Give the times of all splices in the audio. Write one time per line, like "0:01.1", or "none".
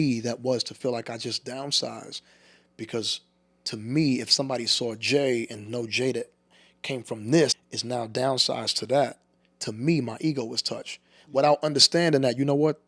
0:07.6